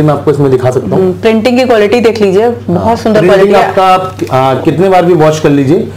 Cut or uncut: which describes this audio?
uncut